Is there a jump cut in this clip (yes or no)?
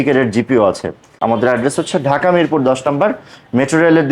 yes